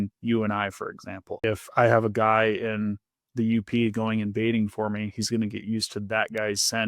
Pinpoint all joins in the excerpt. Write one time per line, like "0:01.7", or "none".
0:01.4